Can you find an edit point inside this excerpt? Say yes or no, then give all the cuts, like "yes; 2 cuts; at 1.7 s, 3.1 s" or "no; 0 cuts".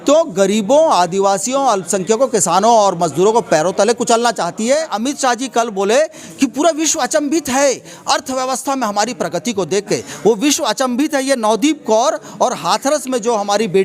yes; 1 cut; at 4.9 s